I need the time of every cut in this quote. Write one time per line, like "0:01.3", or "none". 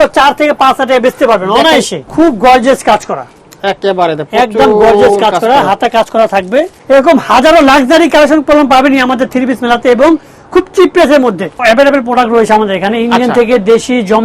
0:02.1
0:06.8
0:11.6